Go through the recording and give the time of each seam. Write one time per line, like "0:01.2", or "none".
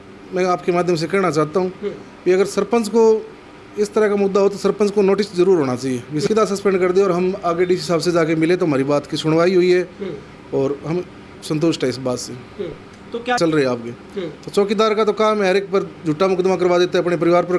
0:06.2
0:13.4